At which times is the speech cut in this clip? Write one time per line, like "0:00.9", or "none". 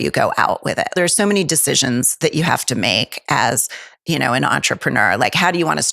0:00.9